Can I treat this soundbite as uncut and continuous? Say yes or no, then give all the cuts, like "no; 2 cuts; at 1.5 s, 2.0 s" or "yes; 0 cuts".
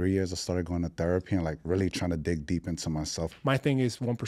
no; 1 cut; at 3.3 s